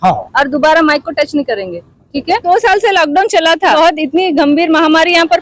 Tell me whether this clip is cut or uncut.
cut